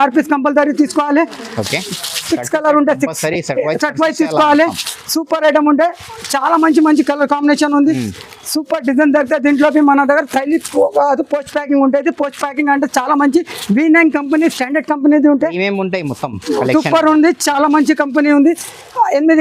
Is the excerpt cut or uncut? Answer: uncut